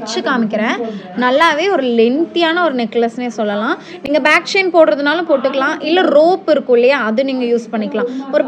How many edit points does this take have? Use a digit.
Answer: 0